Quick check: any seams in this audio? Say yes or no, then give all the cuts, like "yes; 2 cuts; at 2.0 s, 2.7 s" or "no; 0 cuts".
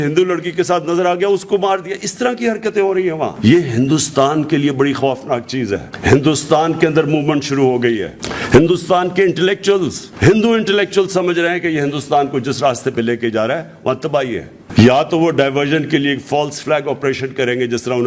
yes; 2 cuts; at 5.9 s, 14.6 s